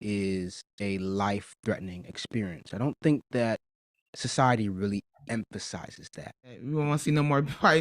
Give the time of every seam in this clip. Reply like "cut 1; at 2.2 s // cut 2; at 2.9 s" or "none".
cut 1; at 6.6 s